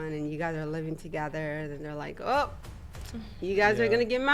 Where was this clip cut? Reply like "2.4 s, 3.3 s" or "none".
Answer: none